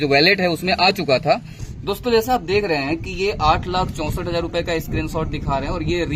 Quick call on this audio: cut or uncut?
cut